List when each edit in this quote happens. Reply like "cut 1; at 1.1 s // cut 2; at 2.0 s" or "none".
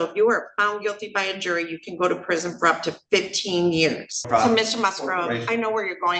cut 1; at 4.3 s

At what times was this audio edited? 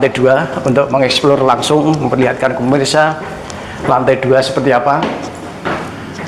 none

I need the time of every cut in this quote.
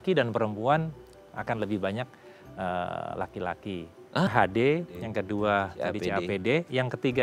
cut 1; at 4.3 s

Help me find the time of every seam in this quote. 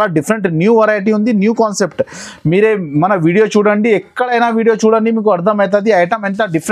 none

